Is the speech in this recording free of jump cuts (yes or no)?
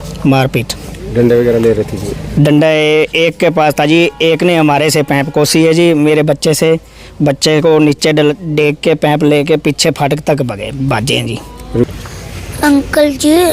no